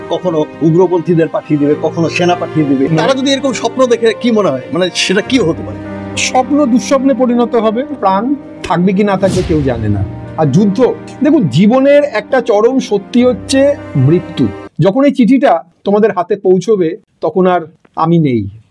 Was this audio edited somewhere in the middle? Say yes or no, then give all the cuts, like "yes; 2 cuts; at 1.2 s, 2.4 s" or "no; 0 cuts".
yes; 3 cuts; at 2.9 s, 7.9 s, 14.6 s